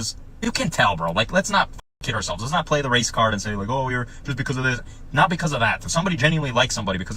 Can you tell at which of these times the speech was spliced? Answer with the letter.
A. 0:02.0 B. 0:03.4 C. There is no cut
B